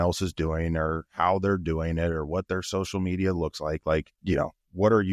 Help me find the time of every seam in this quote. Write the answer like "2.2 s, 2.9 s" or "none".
4.1 s